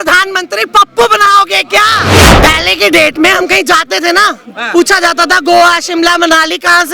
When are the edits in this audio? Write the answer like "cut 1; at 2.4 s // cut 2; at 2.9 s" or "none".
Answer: cut 1; at 2.3 s